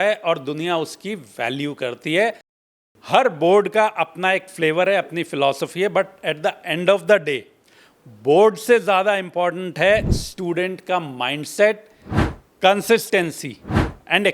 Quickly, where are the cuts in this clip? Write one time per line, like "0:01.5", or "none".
0:02.5